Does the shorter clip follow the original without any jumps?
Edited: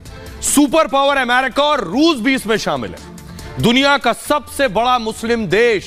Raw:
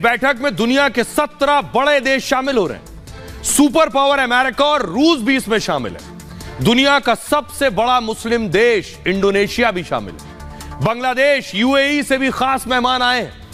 yes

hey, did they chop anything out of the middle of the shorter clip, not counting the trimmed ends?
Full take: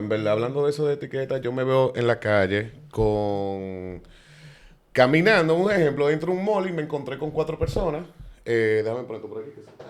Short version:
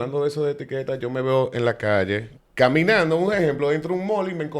yes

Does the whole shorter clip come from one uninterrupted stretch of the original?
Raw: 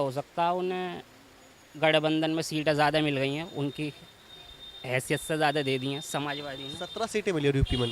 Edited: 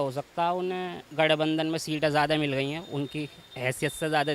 no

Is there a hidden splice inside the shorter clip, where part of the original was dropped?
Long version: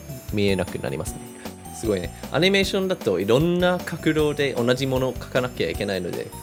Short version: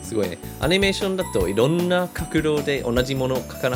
no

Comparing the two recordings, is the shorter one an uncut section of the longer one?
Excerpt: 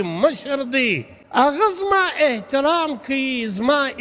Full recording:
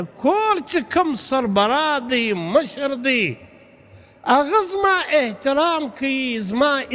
no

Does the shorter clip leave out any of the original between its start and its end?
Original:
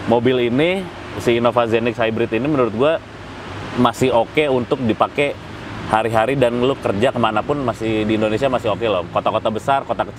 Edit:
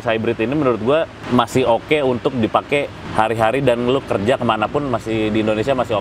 yes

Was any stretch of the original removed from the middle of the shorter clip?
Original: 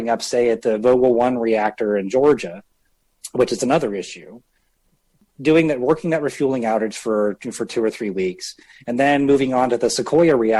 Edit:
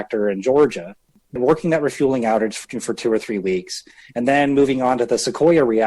yes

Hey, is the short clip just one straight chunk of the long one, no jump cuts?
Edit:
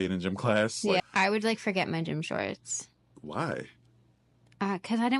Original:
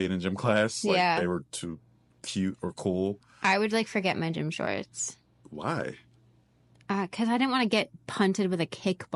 no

